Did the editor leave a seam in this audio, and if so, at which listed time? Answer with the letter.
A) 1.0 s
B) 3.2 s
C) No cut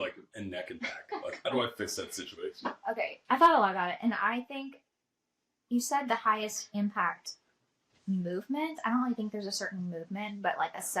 B